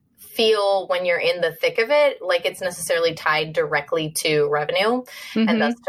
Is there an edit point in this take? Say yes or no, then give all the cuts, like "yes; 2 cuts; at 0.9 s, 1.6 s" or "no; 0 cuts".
no; 0 cuts